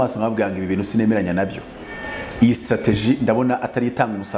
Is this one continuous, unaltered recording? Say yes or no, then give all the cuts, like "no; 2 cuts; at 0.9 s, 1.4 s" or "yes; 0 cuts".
yes; 0 cuts